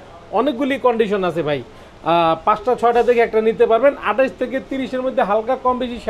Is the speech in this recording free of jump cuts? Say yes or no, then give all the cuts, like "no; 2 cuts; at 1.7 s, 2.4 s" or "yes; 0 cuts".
yes; 0 cuts